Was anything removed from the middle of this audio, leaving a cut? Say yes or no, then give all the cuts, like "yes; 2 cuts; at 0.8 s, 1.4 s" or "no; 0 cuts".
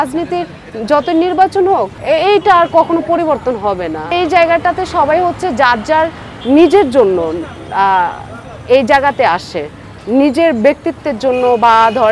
yes; 2 cuts; at 1.9 s, 4.1 s